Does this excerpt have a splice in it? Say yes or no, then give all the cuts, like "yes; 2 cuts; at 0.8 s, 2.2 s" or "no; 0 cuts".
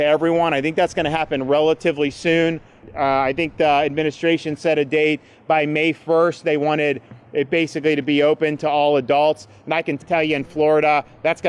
yes; 2 cuts; at 2.9 s, 10.0 s